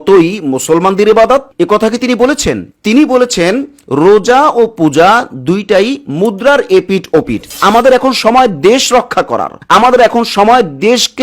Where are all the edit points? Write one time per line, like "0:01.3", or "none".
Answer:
0:02.7
0:07.5

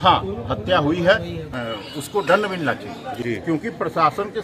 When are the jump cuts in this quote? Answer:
0:01.5
0:03.1

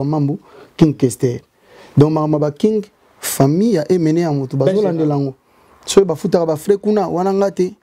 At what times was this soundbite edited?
none

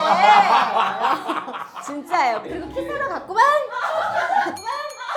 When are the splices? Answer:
none

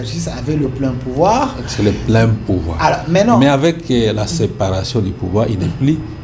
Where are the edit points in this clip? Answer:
none

